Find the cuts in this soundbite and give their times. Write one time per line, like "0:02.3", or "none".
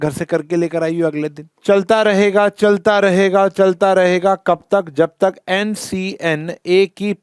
0:01.5